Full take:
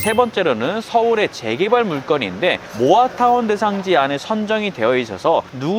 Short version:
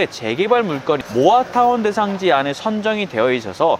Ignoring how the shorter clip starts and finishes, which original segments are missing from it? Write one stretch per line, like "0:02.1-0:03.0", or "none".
0:02.3-0:02.7